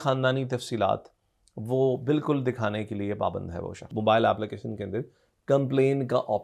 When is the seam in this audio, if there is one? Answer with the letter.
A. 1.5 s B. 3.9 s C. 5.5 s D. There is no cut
B